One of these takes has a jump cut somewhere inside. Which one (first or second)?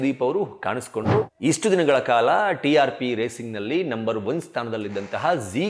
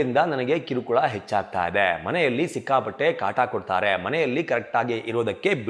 first